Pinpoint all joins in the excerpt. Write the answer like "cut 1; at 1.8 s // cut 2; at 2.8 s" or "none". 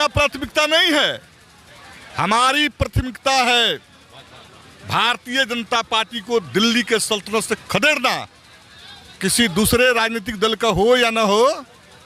none